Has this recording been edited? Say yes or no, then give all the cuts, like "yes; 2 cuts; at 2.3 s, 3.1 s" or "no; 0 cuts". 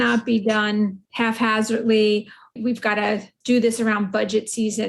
yes; 1 cut; at 1.0 s